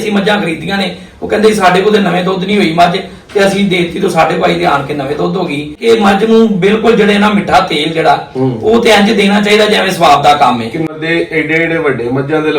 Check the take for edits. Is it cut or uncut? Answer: cut